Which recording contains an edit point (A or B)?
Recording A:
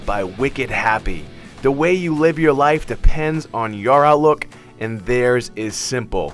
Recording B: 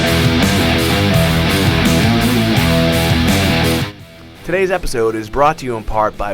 B